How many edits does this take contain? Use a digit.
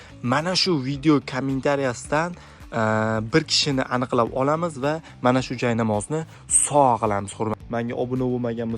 1